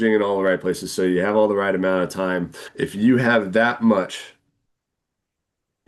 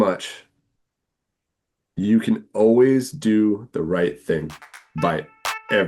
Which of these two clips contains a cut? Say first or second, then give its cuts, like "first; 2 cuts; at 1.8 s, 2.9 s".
first; 1 cut; at 2.6 s